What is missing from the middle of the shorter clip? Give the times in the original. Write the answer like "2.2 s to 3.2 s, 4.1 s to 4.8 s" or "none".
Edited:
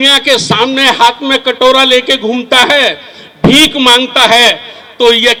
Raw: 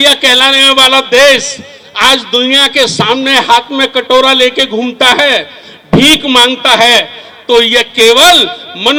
none